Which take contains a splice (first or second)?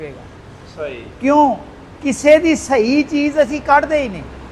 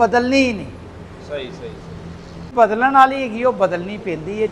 second